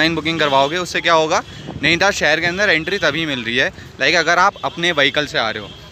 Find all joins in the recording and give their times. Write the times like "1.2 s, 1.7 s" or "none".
none